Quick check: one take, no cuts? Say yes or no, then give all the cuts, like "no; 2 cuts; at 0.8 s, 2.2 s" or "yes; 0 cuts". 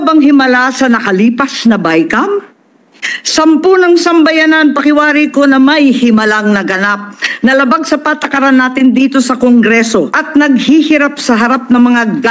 no; 1 cut; at 10.2 s